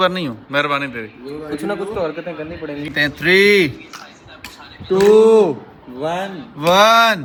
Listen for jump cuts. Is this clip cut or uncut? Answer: uncut